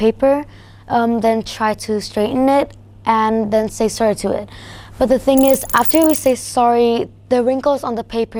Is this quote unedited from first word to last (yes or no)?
yes